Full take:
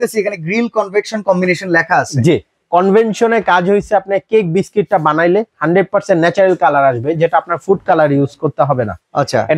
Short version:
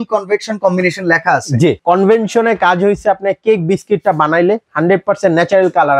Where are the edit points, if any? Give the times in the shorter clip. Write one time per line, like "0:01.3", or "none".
0:01.8